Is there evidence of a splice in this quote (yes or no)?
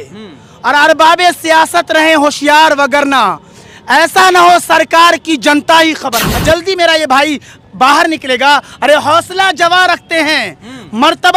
yes